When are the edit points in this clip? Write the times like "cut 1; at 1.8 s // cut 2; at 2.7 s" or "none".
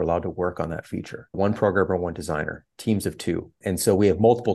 cut 1; at 1.3 s // cut 2; at 3.5 s